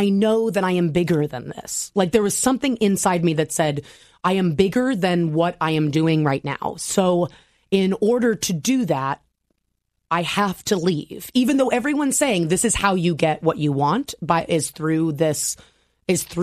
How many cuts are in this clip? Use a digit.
0